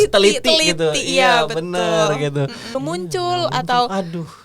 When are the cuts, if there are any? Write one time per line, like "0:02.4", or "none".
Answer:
0:02.7